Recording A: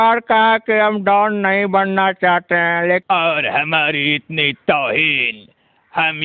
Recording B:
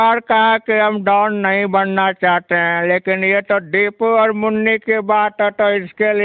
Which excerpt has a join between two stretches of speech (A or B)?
A